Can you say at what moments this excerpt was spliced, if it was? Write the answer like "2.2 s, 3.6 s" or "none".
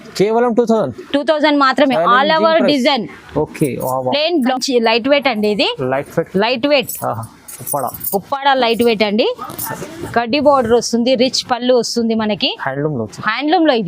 4.5 s